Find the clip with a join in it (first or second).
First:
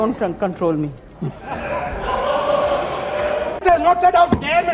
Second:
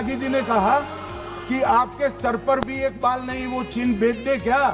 first